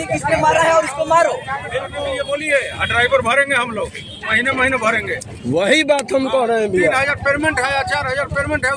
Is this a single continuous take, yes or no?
no